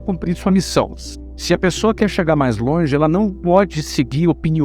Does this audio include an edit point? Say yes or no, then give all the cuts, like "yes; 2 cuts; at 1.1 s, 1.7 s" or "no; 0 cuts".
yes; 1 cut; at 1.0 s